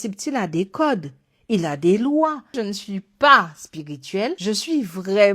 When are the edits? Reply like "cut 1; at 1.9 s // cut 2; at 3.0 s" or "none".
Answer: cut 1; at 2.6 s // cut 2; at 4.4 s